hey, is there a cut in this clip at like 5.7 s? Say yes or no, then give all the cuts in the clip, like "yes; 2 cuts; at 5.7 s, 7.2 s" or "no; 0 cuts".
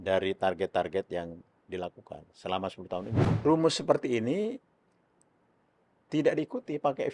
no; 1 cut; at 3.2 s